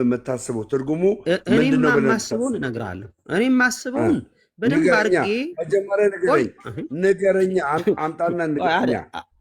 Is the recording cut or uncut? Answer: uncut